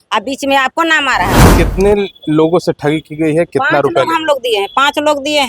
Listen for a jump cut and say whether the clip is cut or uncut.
cut